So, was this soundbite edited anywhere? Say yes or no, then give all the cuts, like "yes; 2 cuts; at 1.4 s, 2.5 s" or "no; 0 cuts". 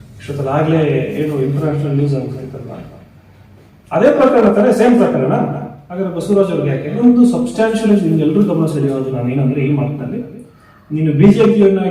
yes; 1 cut; at 7.0 s